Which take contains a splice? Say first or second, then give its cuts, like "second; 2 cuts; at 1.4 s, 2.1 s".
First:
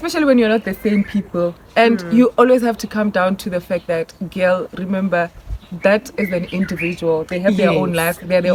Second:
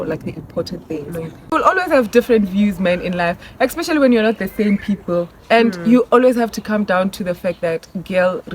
second; 1 cut; at 1.5 s